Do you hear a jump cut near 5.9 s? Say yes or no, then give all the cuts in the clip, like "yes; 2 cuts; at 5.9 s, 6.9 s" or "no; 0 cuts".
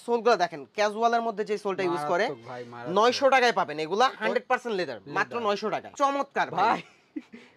yes; 1 cut; at 5.9 s